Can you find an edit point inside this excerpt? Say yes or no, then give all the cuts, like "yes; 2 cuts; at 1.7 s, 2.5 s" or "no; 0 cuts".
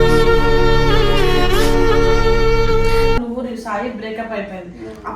yes; 1 cut; at 3.2 s